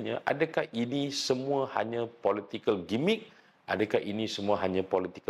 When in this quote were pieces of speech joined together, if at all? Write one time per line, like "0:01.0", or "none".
none